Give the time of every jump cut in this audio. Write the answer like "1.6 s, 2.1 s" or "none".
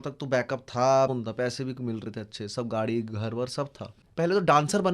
1.1 s, 3.9 s